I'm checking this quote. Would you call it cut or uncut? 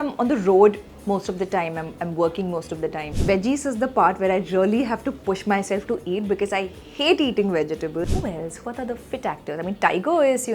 cut